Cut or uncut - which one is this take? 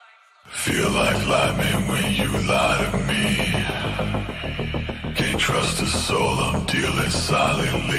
uncut